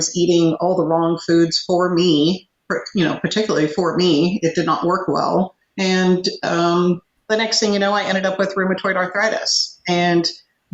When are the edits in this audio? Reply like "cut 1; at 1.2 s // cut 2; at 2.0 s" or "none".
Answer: cut 1; at 5.6 s // cut 2; at 7.1 s